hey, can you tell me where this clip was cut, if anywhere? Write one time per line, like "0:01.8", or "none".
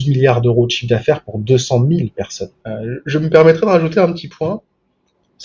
0:02.7